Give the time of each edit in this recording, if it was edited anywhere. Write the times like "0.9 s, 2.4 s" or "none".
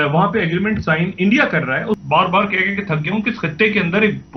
2.0 s